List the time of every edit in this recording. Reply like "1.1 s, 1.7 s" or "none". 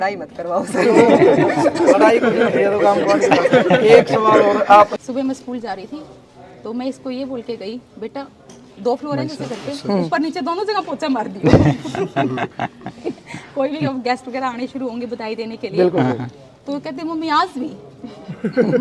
4.9 s